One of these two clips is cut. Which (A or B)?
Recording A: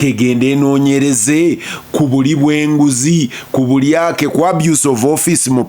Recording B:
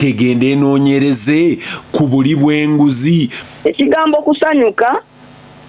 B